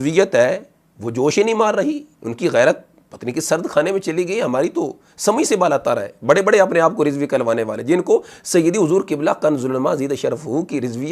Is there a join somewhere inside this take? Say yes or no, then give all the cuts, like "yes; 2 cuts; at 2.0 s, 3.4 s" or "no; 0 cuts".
no; 0 cuts